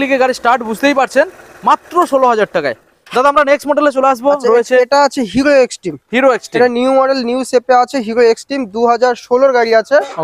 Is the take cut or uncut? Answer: uncut